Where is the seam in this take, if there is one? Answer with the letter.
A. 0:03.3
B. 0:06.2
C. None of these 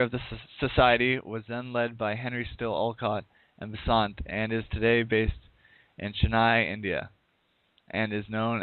C